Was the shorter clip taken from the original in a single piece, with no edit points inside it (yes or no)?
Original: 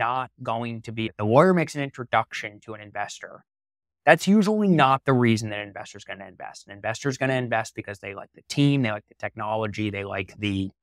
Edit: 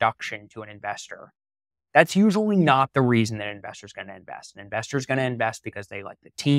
yes